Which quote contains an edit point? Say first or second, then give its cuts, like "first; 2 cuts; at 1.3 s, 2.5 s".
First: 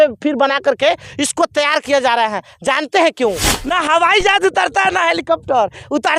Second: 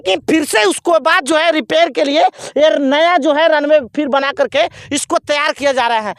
first; 1 cut; at 3.5 s